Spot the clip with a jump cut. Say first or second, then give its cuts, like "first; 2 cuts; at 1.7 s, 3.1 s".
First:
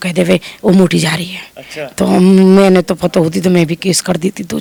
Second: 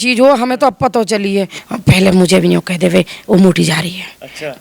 second; 1 cut; at 1.6 s